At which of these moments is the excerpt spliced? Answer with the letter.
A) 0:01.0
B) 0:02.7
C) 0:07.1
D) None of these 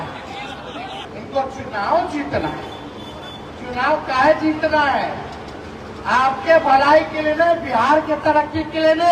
A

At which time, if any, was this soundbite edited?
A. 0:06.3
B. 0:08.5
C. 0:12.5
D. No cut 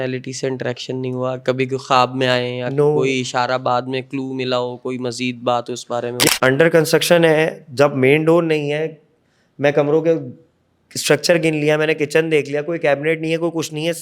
A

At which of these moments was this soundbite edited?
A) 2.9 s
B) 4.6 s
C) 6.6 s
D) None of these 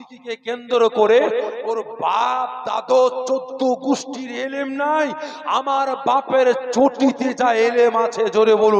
D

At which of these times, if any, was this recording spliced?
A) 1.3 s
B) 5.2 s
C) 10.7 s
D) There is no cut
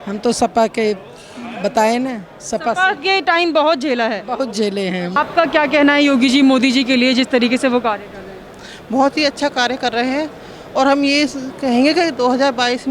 B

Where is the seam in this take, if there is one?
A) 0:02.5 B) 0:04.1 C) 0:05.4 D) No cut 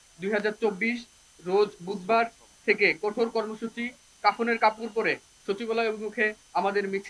B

